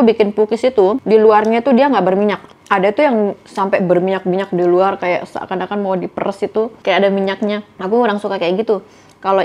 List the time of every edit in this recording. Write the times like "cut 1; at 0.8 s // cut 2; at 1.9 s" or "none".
cut 1; at 1.0 s

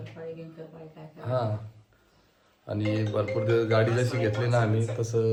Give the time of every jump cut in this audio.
none

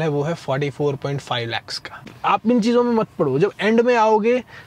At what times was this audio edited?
cut 1; at 2.1 s

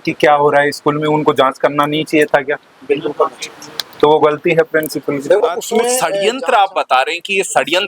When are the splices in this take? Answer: cut 1; at 6.1 s

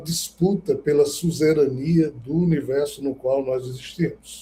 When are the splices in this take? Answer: none

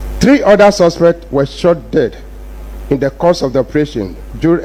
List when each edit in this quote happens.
none

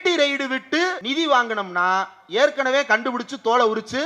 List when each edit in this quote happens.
cut 1; at 1.0 s

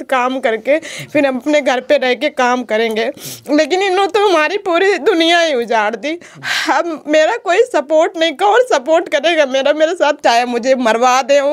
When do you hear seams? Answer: cut 1; at 10.2 s

